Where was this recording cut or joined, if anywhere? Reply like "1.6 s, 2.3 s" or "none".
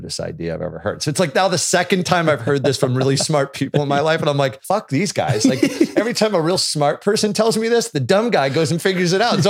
4.6 s